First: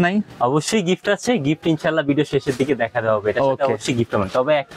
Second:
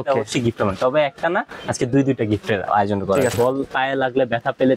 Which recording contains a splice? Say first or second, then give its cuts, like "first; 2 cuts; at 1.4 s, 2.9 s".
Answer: second; 1 cut; at 3.3 s